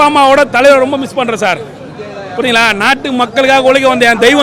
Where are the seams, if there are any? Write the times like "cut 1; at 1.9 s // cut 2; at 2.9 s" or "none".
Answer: none